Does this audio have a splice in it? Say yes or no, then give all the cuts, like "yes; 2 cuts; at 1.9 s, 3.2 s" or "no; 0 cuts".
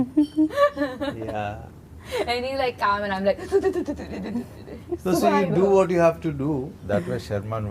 yes; 1 cut; at 6.7 s